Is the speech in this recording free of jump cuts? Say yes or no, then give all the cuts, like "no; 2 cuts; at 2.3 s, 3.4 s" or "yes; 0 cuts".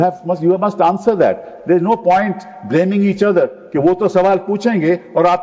yes; 0 cuts